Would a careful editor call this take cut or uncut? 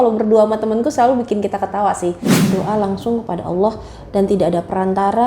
cut